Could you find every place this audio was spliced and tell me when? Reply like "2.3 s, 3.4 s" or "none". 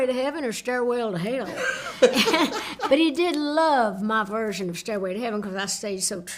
2.7 s